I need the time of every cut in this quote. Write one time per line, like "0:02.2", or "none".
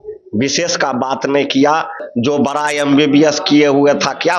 0:02.0